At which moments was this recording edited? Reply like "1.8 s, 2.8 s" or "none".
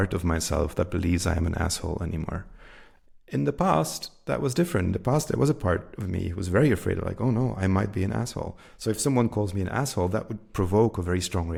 none